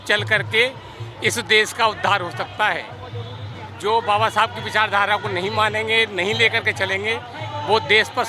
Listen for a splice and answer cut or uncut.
uncut